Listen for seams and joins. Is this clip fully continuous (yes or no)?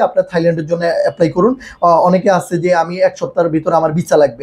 yes